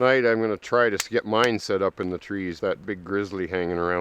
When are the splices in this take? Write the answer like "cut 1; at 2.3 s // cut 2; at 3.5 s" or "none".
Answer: cut 1; at 2.6 s